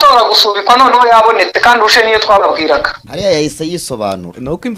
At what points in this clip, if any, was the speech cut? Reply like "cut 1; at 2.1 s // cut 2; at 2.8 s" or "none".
cut 1; at 3.0 s